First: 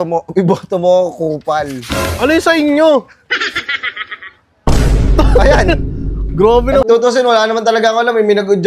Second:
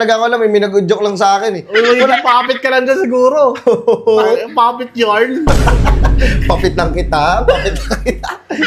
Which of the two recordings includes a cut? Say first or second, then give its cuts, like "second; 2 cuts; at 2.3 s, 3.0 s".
first; 1 cut; at 6.8 s